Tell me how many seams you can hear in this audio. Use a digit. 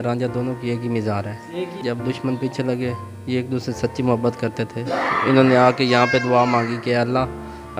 1